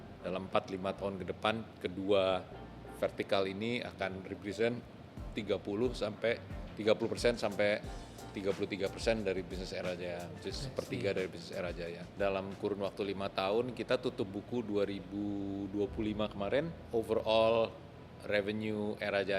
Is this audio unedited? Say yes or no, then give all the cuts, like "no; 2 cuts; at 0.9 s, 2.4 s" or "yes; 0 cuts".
no; 3 cuts; at 1.7 s, 12.1 s, 16.8 s